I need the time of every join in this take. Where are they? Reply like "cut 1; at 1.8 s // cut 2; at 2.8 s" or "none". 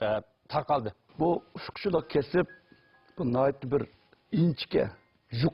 cut 1; at 1.0 s